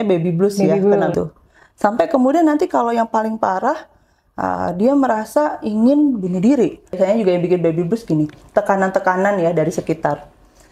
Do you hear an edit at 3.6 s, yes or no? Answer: no